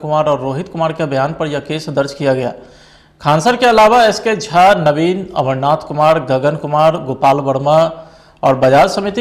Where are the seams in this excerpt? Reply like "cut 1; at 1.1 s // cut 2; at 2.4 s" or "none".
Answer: none